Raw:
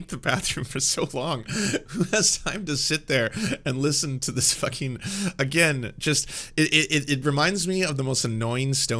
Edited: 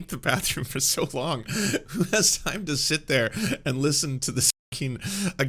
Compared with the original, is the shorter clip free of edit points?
yes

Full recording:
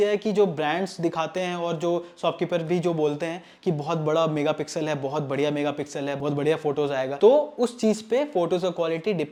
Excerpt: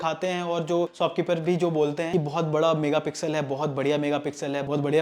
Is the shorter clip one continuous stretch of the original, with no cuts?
no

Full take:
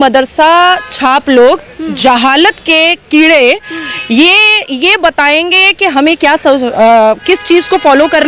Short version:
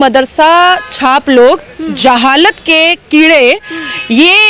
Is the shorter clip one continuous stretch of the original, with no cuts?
yes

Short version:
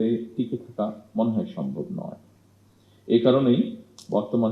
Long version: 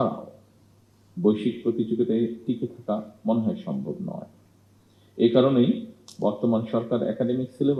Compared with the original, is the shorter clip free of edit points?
yes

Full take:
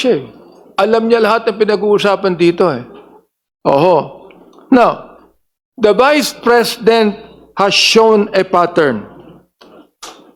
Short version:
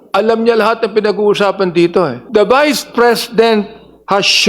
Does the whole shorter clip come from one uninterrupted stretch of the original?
no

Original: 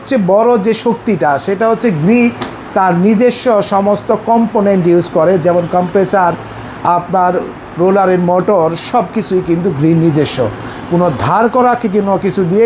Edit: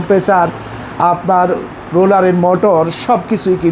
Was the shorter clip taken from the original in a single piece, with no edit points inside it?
yes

